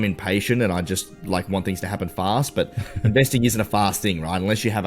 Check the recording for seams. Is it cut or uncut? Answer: uncut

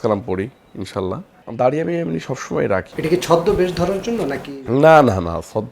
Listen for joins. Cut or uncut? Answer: cut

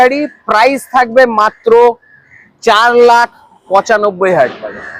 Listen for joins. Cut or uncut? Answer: uncut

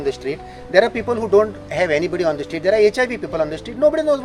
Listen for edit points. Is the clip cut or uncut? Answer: uncut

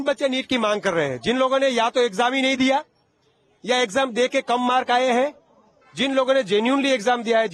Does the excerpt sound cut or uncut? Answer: uncut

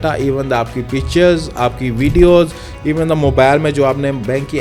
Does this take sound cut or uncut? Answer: uncut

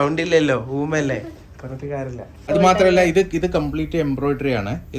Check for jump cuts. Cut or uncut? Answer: cut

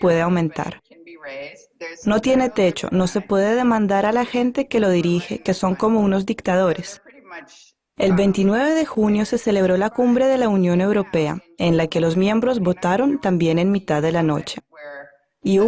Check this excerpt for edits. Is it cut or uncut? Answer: cut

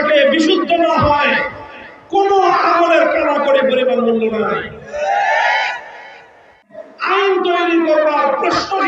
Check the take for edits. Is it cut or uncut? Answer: cut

